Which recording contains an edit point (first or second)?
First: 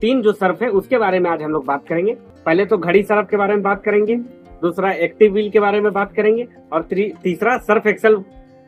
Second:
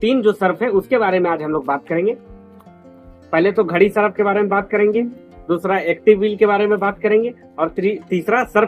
first